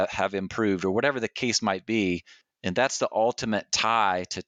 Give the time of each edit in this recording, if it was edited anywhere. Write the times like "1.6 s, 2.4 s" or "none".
none